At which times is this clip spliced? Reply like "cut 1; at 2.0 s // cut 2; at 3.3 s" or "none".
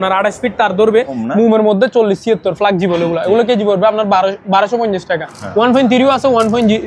cut 1; at 1.2 s // cut 2; at 5.4 s